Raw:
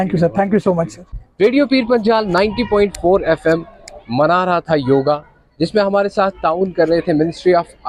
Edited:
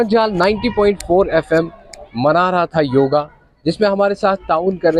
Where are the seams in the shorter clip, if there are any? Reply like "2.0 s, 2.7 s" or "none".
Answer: none